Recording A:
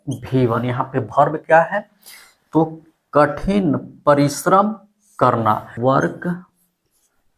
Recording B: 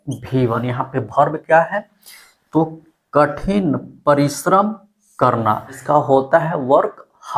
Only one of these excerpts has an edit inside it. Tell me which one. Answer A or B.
A